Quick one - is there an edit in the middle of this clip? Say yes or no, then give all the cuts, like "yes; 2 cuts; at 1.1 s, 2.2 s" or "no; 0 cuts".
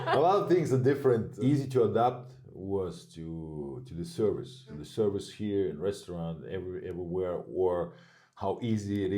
yes; 2 cuts; at 1.3 s, 4.8 s